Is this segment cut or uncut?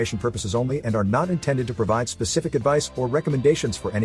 uncut